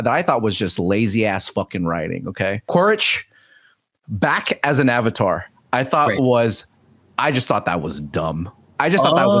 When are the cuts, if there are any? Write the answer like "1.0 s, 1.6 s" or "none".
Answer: 2.7 s